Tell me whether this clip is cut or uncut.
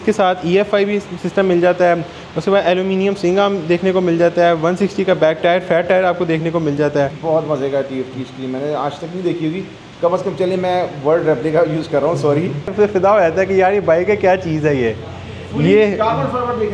cut